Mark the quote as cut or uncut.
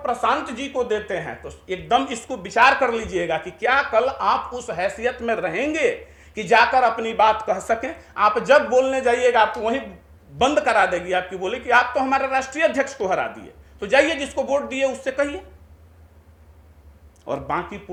uncut